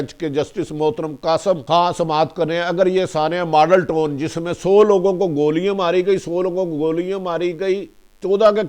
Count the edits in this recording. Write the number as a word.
one